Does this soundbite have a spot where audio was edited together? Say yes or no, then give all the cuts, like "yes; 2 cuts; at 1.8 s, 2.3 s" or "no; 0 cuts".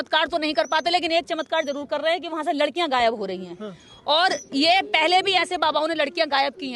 no; 0 cuts